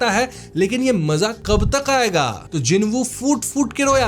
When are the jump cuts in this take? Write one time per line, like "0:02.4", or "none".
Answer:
0:02.4